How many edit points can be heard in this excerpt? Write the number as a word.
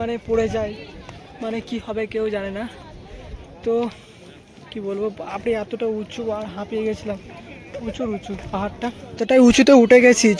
one